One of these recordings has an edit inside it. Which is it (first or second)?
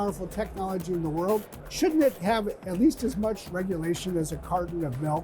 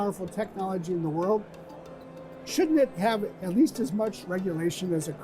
first